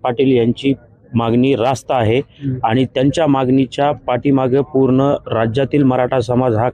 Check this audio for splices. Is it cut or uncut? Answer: uncut